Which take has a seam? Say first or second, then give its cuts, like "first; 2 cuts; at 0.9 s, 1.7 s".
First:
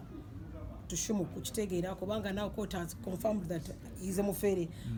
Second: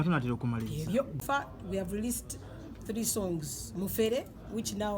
second; 1 cut; at 1.2 s